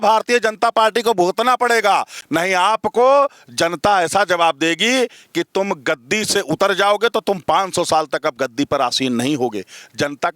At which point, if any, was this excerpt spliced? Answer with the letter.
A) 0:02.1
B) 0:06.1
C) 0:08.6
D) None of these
A